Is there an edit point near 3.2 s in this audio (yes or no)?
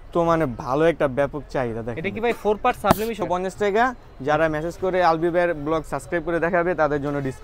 yes